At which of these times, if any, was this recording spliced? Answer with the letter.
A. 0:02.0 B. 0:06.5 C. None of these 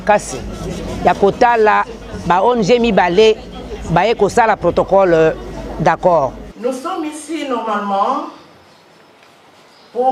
B